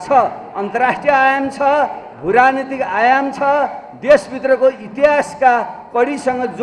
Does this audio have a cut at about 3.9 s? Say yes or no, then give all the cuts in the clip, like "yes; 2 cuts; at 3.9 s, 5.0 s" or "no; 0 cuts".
no; 0 cuts